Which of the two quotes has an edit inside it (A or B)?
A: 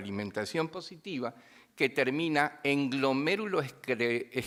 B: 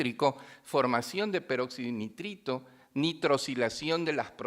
B